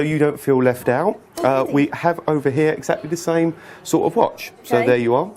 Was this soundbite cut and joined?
no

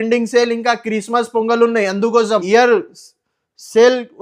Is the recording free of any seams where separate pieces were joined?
no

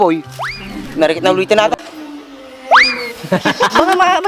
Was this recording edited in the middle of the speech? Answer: yes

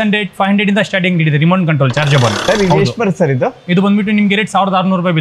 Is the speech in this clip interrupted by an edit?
yes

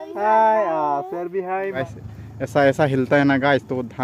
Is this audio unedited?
no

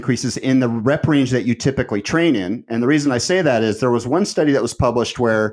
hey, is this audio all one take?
yes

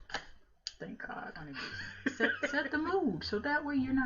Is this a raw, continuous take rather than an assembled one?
no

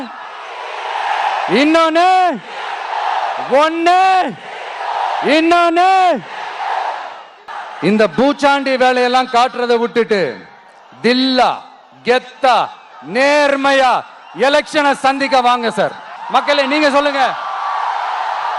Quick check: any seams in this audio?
yes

